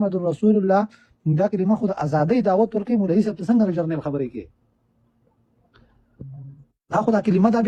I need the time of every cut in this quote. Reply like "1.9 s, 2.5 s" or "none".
none